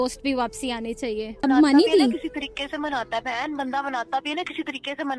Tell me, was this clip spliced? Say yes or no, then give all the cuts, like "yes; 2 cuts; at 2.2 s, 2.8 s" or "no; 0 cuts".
yes; 1 cut; at 1.4 s